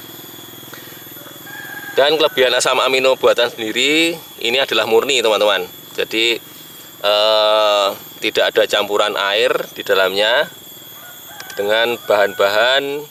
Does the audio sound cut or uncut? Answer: uncut